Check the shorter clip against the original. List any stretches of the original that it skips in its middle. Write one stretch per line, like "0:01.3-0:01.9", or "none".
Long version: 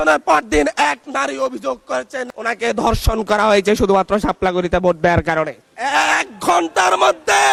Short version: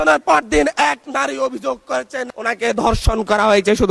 none